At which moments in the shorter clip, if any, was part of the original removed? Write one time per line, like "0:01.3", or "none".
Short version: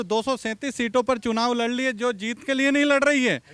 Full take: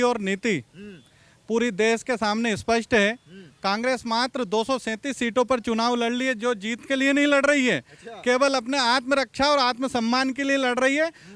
none